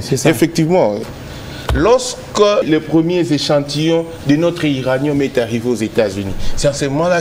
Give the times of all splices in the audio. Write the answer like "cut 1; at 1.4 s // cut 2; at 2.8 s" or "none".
cut 1; at 1.0 s // cut 2; at 2.7 s